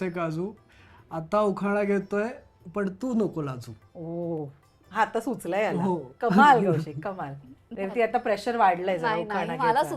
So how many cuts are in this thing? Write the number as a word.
zero